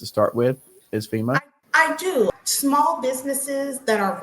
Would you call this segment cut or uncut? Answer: cut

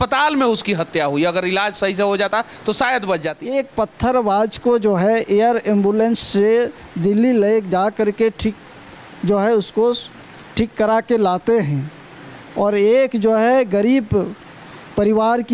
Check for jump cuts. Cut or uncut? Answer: cut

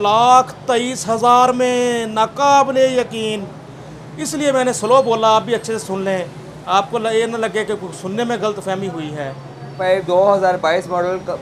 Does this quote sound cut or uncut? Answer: cut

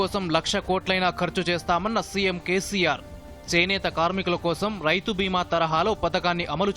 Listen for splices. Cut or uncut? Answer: uncut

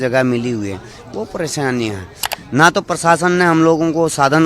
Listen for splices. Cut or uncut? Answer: cut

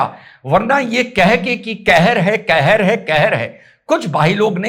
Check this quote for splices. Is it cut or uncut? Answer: uncut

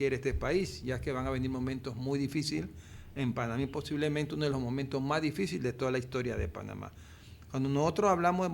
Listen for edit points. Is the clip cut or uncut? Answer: uncut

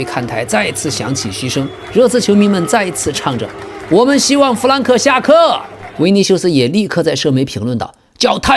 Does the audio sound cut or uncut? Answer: cut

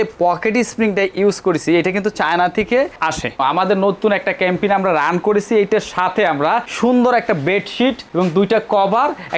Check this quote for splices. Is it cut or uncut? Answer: cut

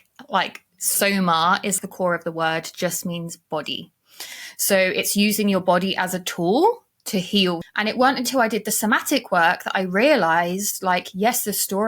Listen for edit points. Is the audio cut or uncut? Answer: cut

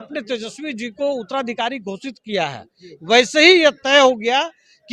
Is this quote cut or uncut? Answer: uncut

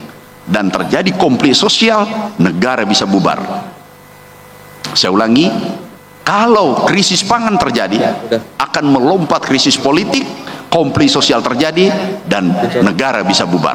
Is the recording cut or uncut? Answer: uncut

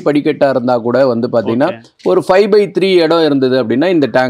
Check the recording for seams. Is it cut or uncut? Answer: uncut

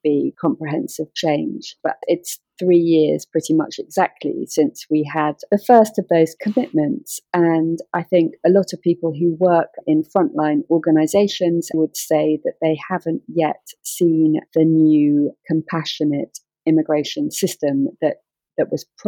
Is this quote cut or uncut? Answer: cut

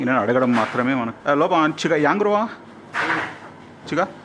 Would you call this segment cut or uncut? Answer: cut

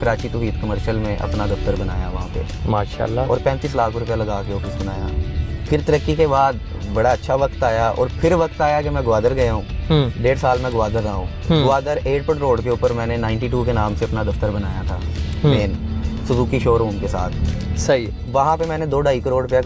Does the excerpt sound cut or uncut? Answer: uncut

